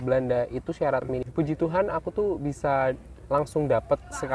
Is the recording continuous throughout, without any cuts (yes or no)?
no